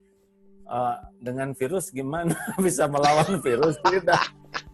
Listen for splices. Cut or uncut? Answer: uncut